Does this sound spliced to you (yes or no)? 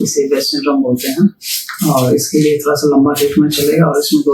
no